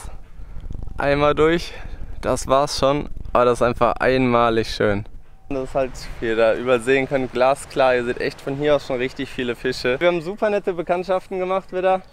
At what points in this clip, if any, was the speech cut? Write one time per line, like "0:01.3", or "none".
0:05.5
0:10.0